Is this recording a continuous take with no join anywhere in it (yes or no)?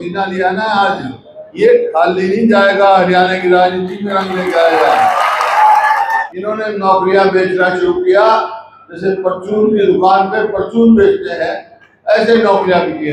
no